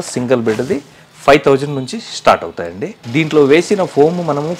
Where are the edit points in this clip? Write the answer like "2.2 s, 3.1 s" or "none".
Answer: none